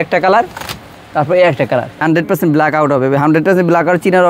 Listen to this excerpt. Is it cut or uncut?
cut